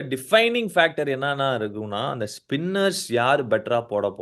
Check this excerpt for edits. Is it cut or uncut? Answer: uncut